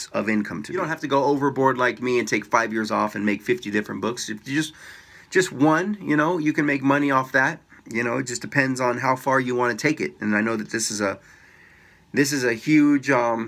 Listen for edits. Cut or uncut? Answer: cut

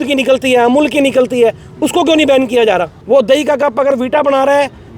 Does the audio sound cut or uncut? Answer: cut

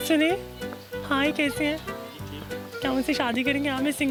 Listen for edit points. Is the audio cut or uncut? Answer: uncut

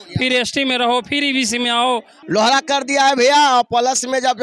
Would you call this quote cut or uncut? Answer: cut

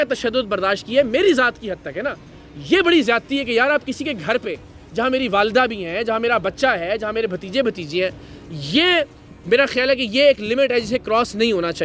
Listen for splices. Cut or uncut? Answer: uncut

